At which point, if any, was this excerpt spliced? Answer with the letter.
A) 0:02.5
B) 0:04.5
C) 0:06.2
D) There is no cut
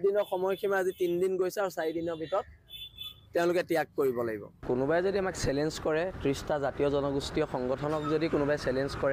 B